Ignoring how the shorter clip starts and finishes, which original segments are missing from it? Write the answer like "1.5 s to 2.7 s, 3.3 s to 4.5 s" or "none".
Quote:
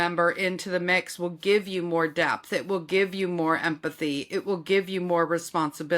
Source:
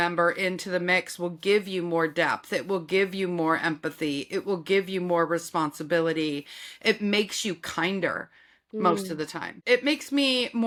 none